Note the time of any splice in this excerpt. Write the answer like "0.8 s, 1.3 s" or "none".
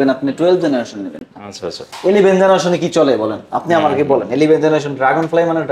none